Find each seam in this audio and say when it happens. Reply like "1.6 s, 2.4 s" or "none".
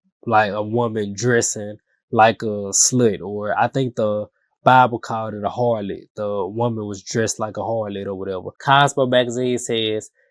8.5 s